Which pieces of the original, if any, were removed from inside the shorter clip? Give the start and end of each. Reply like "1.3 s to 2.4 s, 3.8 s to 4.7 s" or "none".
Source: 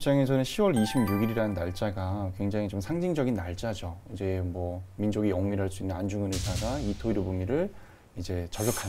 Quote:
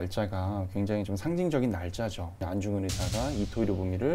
4.1 s to 5.9 s